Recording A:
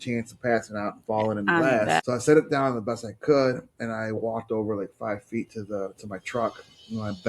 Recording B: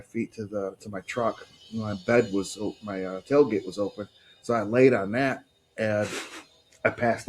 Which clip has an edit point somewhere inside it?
A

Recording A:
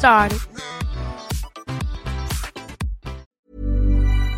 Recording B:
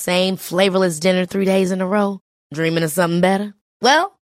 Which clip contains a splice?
A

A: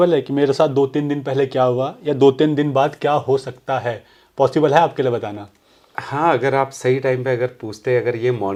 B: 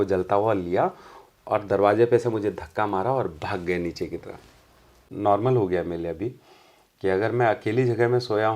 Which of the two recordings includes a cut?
B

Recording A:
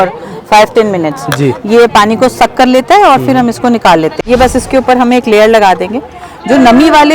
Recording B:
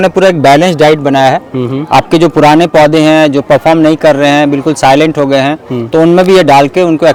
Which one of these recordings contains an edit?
A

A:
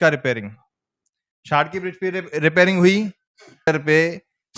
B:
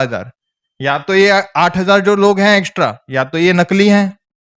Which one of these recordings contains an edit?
A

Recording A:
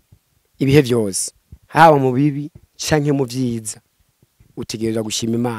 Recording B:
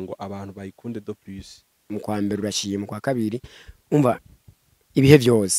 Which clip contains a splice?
B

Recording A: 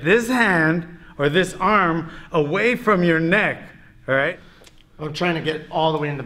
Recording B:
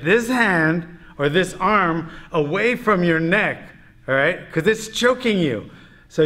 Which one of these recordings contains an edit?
A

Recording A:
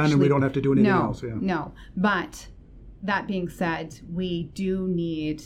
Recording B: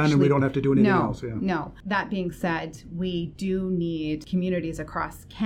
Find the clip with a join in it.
B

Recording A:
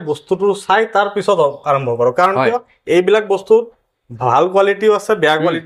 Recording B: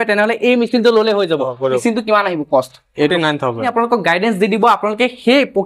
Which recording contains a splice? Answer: B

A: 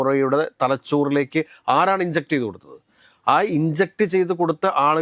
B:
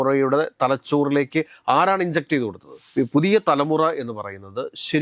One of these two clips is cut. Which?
B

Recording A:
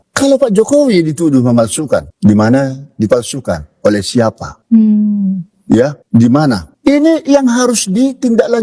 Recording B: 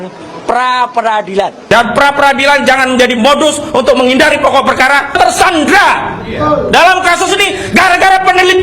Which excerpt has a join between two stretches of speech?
B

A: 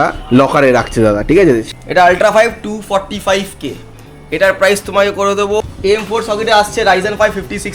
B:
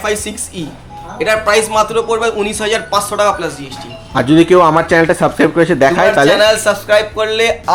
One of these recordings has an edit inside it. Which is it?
A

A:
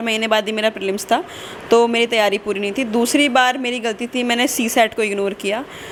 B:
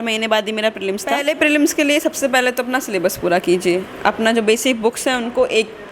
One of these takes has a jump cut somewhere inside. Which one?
B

